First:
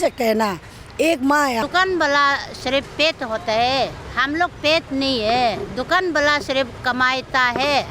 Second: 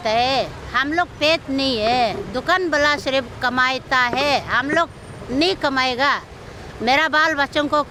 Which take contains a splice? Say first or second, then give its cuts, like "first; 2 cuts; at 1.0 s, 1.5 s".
first; 1 cut; at 1.6 s